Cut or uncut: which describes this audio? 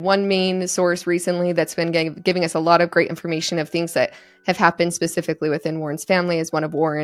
uncut